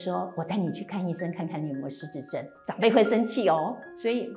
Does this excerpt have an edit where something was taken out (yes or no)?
no